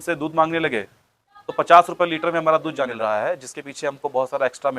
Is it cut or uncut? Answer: cut